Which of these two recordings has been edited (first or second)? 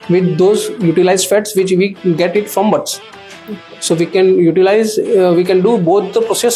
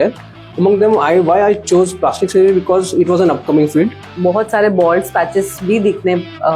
second